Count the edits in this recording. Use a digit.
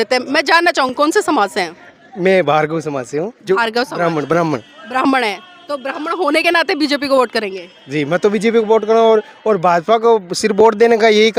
0